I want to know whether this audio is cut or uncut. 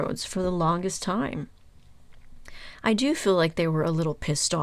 uncut